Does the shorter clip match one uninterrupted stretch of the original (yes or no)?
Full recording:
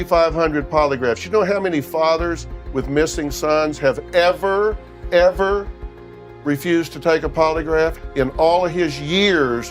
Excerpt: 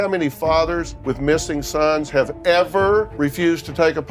no